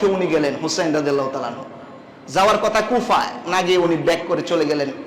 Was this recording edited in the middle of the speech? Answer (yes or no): no